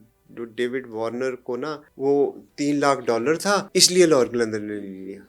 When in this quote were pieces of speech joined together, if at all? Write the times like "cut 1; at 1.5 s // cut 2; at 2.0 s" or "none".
cut 1; at 1.8 s // cut 2; at 3.7 s